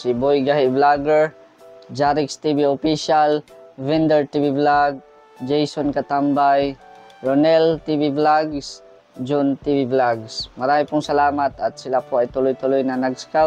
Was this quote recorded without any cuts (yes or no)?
yes